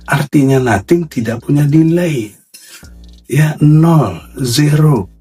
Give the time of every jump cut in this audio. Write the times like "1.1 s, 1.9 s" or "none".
none